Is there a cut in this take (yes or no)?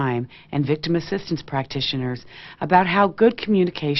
no